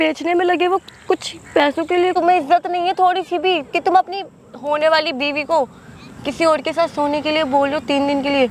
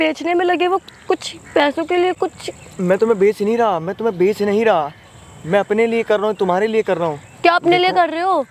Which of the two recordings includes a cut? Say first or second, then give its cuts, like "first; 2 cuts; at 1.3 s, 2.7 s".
first; 1 cut; at 2.1 s